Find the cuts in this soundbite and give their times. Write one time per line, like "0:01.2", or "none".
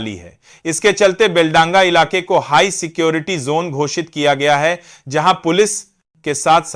none